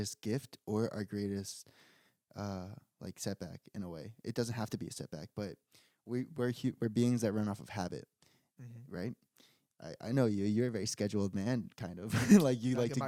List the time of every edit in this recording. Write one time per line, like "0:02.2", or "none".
none